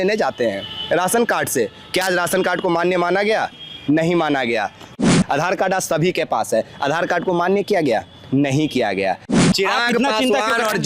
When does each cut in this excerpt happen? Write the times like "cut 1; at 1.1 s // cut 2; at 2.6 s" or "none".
cut 1; at 5.0 s // cut 2; at 9.4 s